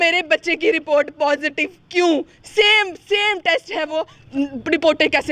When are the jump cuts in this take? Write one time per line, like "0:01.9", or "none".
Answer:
0:04.2